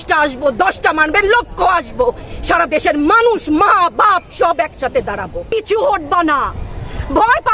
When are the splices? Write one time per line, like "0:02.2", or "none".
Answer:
0:05.5